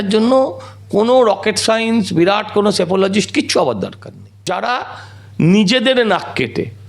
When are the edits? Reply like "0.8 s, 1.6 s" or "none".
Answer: 4.4 s